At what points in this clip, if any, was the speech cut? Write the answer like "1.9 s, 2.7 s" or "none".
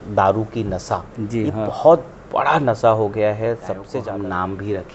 3.9 s

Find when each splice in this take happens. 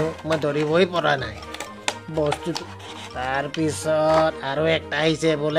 2.6 s

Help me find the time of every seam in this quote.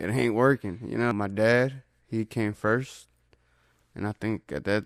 1.1 s

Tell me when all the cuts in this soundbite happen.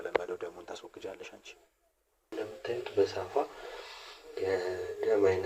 2.3 s

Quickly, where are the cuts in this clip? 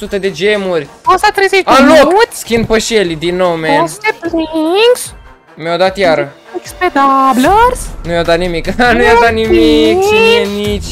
none

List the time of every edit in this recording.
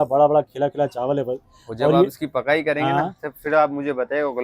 none

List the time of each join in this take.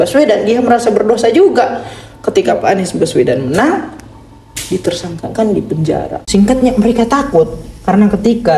6.2 s

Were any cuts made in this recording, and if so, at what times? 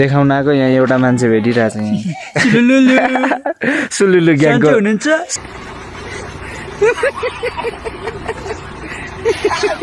3.5 s, 5.3 s

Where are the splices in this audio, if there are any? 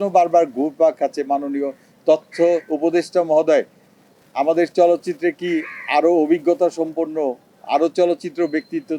none

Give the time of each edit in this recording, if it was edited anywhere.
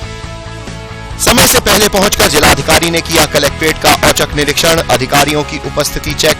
1.2 s

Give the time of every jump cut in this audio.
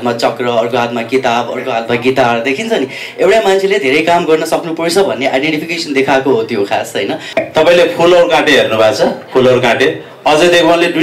7.2 s

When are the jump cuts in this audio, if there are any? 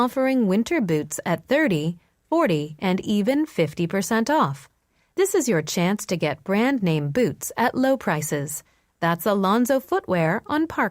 4.7 s, 8.8 s

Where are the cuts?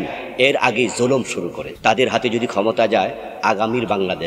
1.6 s

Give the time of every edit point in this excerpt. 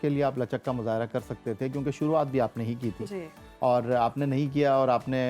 none

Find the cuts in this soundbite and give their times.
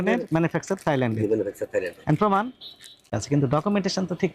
3.1 s

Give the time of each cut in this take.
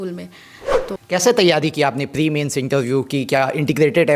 1.0 s

